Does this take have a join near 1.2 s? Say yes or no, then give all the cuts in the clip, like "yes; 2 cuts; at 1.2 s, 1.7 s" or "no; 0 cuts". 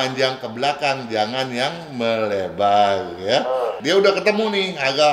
no; 1 cut; at 3.8 s